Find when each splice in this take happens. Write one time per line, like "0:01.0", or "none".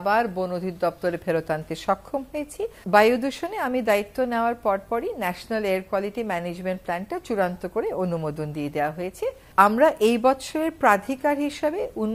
0:02.8
0:09.4